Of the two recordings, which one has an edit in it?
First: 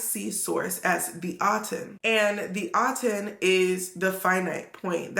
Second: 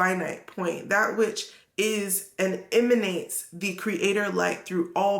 first; 1 cut; at 1.9 s

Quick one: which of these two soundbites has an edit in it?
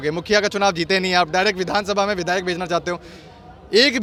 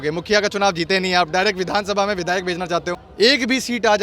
second; 1 cut; at 3.0 s

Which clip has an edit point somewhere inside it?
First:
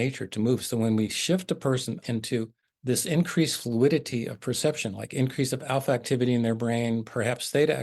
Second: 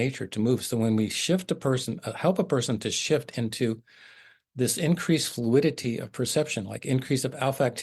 first; 1 cut; at 2.1 s

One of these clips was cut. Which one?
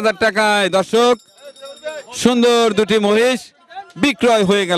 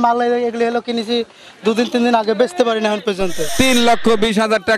second; 1 cut; at 3.4 s

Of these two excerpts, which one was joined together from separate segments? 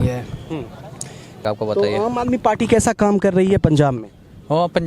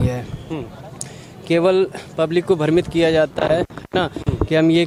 first; 1 cut; at 1.4 s

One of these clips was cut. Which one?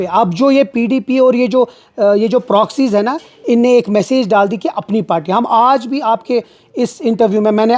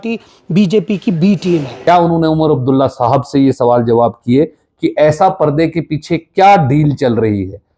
second; 1 cut; at 1.7 s

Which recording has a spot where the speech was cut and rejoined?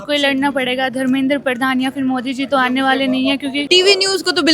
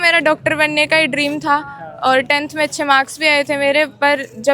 first; 1 cut; at 3.6 s

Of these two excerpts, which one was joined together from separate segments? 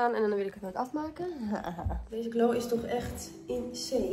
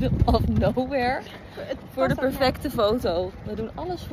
first; 1 cut; at 2.0 s

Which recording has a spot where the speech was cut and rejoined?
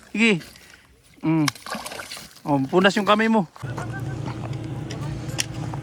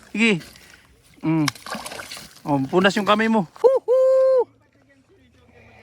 second; 1 cut; at 3.5 s

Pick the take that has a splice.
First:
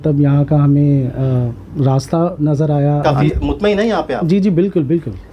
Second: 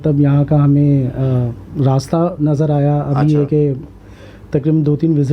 first; 1 cut; at 3.2 s

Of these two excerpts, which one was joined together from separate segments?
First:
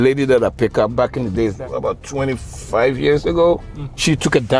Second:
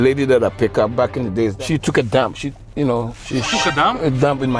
second; 1 cut; at 1.6 s

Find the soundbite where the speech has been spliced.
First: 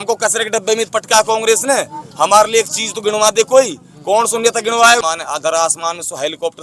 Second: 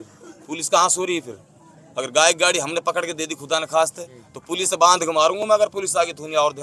first; 1 cut; at 5.0 s

